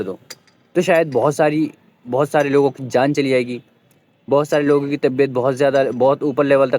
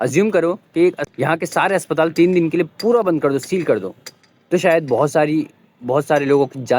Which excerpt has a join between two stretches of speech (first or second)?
second